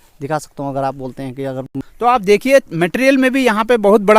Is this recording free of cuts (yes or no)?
no